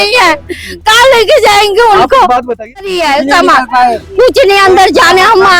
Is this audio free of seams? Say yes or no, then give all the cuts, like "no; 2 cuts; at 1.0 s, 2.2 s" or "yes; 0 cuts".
no; 1 cut; at 2.9 s